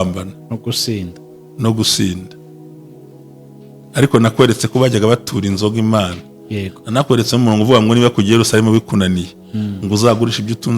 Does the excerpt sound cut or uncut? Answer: cut